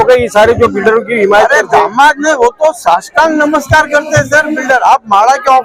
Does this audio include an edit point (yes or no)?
no